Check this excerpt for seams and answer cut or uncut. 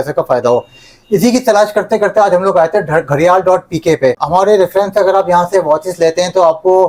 uncut